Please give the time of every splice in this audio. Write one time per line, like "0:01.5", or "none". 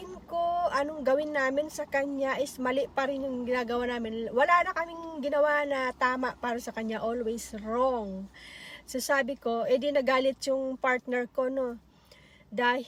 none